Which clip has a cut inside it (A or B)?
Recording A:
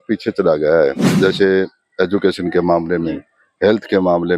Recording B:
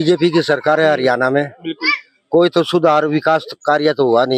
A